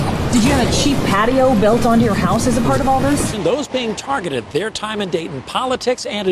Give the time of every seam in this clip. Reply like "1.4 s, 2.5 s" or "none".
3.3 s